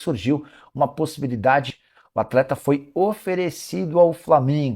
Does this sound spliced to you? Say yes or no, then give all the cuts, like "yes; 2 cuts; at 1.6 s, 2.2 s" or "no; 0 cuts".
yes; 1 cut; at 1.8 s